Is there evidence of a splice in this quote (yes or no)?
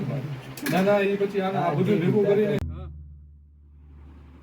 yes